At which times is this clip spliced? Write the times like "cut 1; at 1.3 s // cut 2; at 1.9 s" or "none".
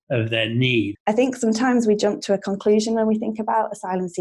cut 1; at 0.9 s